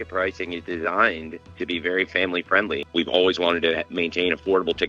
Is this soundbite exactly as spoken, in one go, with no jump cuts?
no; 1 cut; at 2.8 s

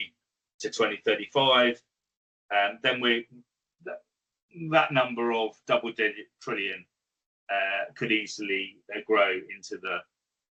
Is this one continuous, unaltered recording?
yes; 0 cuts

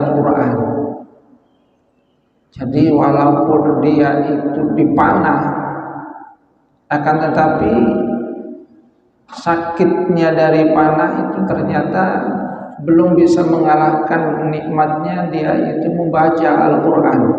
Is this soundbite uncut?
yes; 0 cuts

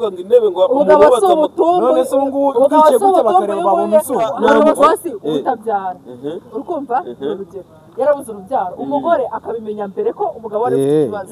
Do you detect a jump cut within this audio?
yes; 1 cut; at 4.4 s

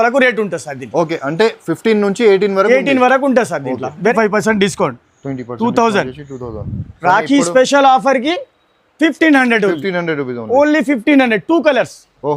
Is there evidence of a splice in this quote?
yes; 1 cut; at 4.0 s

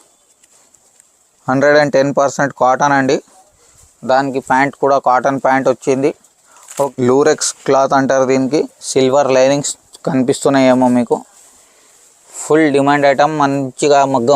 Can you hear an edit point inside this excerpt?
yes; 1 cut; at 6.9 s

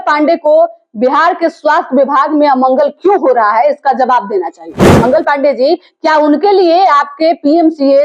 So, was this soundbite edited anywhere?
yes; 1 cut; at 4.9 s

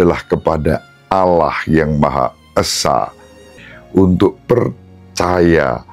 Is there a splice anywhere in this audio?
yes; 1 cut; at 3.5 s

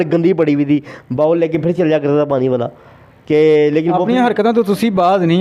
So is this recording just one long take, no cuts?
yes; 0 cuts

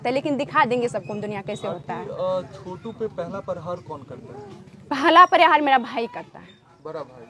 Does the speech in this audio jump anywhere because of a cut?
no; 0 cuts

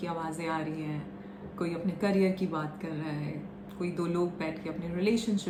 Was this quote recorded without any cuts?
yes; 0 cuts

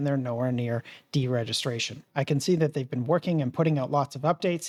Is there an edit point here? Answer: no; 0 cuts

